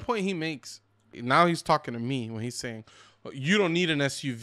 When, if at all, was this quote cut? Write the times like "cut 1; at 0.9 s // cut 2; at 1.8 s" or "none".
cut 1; at 1.1 s